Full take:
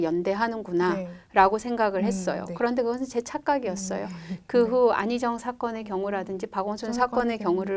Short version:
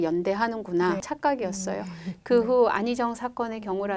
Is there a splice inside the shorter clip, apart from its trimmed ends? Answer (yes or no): yes